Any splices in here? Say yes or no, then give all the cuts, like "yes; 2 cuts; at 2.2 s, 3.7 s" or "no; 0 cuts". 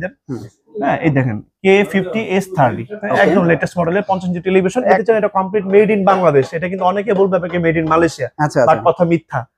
yes; 1 cut; at 5.0 s